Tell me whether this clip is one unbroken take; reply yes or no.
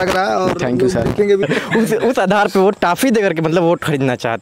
no